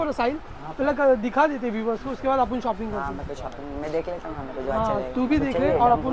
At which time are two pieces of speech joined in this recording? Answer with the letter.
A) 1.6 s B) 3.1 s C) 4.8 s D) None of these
D